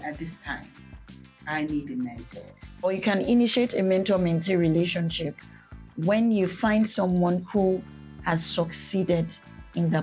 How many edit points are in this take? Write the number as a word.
one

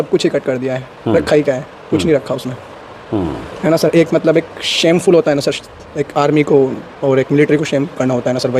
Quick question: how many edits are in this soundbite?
zero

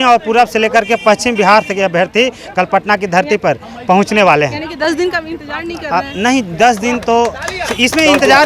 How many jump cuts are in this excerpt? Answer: zero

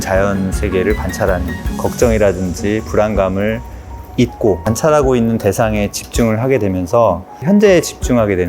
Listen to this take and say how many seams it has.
two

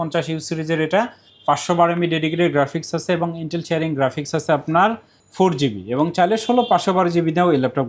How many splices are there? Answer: zero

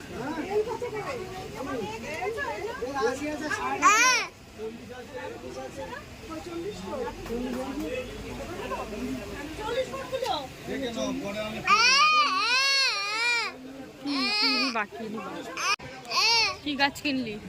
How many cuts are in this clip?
zero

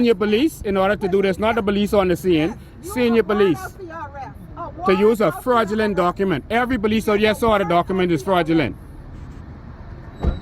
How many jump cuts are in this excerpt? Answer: one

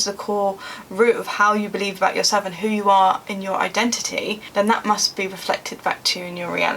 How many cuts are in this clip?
two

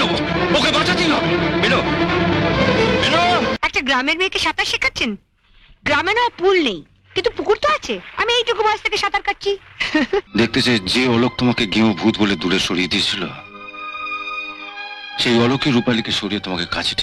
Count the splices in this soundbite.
two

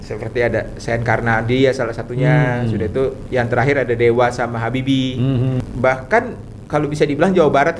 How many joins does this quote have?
one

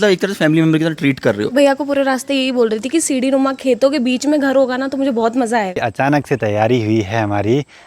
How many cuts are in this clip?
two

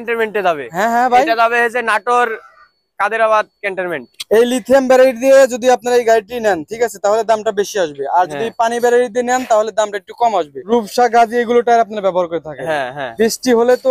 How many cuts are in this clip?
three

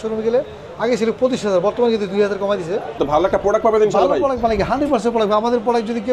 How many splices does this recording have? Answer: one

